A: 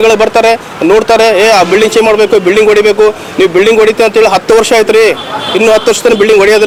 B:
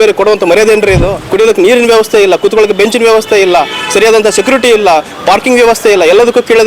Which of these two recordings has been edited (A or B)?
B